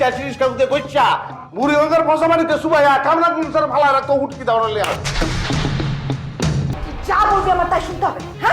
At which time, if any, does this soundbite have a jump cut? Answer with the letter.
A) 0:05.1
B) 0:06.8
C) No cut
B